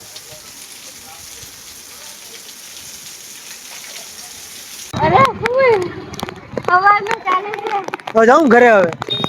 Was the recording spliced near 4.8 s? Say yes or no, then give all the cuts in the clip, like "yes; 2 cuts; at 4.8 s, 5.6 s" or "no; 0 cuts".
yes; 1 cut; at 4.8 s